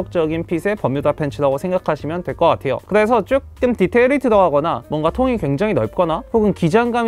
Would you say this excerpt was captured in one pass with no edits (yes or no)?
yes